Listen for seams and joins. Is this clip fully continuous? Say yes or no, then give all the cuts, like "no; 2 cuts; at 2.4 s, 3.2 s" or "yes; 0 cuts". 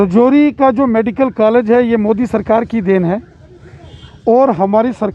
yes; 0 cuts